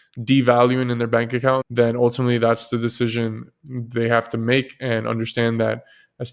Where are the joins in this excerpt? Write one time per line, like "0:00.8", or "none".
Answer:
0:01.7